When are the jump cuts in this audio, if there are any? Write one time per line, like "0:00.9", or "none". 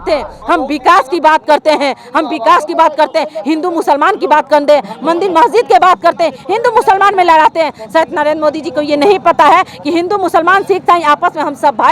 none